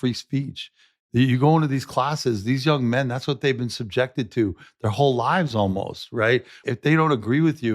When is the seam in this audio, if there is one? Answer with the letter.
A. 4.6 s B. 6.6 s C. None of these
B